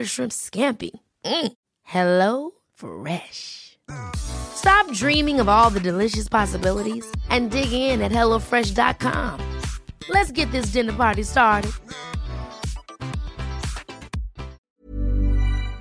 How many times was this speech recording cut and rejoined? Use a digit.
1